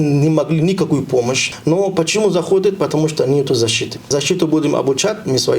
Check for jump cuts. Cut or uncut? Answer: cut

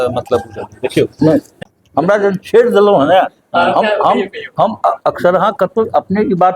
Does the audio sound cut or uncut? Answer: cut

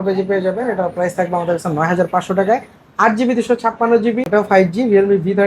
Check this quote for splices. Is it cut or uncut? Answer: cut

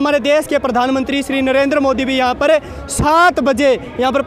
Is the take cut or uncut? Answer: uncut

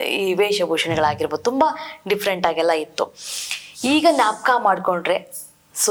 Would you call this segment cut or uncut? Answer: uncut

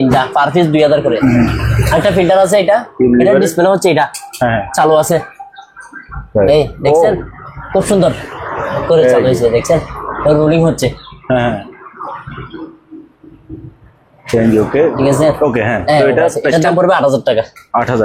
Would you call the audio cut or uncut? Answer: uncut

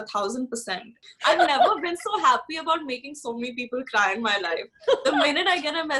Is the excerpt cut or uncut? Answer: cut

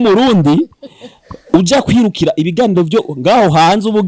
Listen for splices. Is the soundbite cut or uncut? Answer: uncut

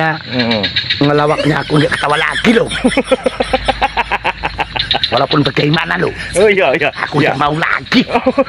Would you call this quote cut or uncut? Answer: uncut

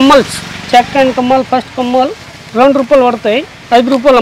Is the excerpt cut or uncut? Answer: uncut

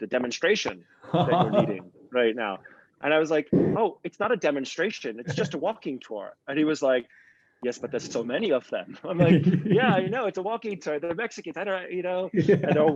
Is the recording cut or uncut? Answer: uncut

